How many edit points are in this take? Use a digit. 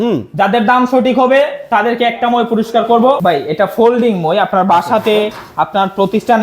1